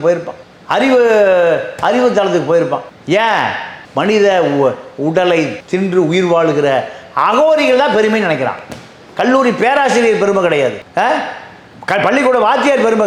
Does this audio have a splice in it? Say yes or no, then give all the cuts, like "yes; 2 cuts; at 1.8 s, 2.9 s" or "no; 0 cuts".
no; 0 cuts